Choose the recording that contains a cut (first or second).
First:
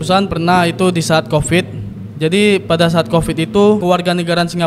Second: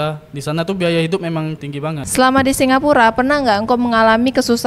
second